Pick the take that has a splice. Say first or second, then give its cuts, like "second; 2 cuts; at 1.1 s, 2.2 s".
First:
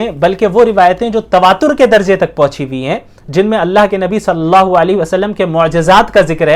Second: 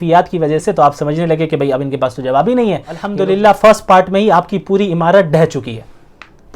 second; 1 cut; at 3.1 s